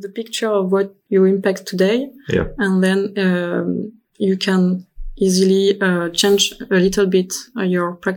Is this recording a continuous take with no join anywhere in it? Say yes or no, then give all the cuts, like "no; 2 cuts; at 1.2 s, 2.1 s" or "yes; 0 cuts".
no; 1 cut; at 1.0 s